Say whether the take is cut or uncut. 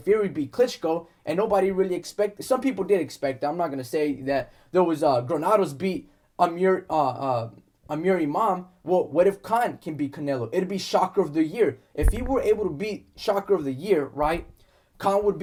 uncut